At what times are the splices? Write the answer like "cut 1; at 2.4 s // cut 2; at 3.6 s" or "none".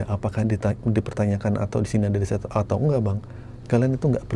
none